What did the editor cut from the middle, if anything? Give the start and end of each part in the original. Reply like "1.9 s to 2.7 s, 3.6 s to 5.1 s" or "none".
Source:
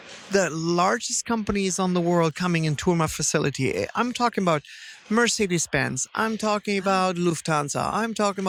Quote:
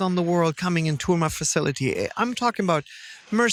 none